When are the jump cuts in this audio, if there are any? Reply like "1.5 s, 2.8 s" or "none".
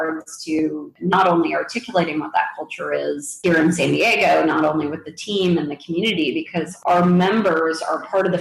none